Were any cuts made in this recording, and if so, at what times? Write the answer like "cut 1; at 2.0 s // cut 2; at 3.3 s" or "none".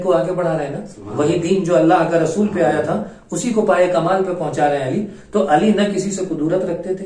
none